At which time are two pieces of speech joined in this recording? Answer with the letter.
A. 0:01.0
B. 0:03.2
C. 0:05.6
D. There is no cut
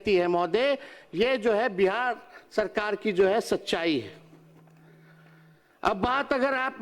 D